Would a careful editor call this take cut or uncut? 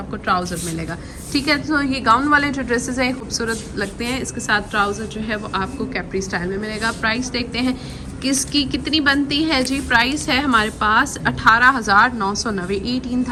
uncut